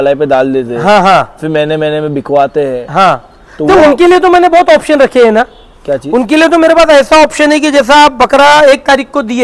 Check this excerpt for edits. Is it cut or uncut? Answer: uncut